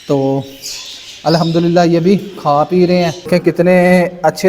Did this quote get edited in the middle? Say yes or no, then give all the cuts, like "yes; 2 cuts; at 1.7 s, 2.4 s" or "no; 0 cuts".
yes; 1 cut; at 3.3 s